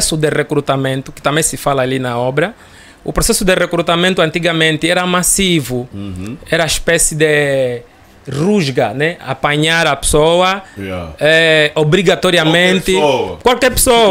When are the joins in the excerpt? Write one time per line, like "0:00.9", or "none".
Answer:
none